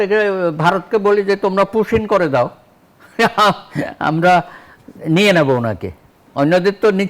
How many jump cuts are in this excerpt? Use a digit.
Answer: 0